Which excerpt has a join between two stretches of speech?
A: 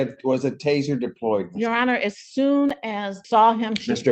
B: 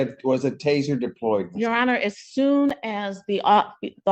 A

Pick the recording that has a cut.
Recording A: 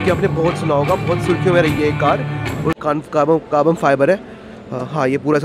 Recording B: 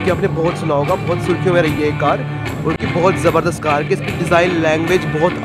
A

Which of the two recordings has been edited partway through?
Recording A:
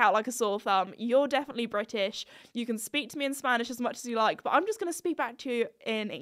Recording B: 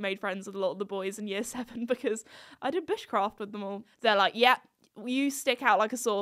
B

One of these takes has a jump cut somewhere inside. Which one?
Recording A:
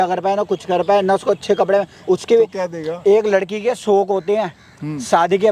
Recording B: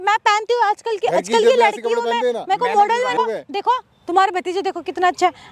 B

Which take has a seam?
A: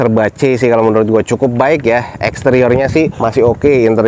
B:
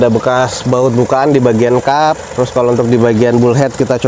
A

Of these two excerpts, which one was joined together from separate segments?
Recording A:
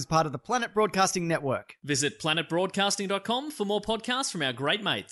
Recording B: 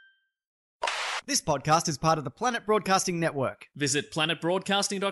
B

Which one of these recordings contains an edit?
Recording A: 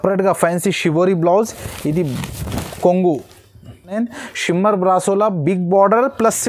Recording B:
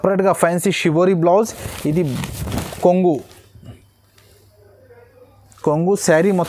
A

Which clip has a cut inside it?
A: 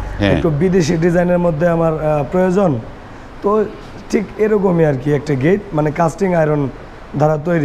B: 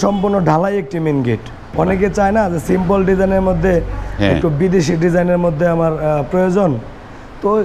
B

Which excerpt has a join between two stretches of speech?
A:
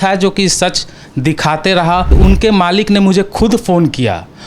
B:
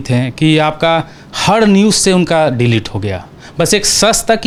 A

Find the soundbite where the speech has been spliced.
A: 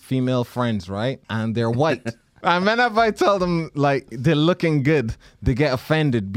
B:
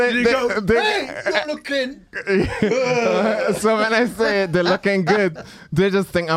A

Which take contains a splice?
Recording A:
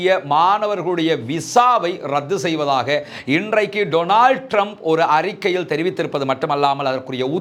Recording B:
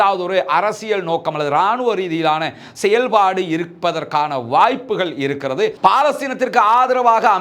B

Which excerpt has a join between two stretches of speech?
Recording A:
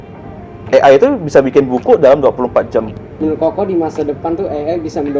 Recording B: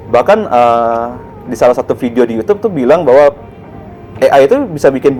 A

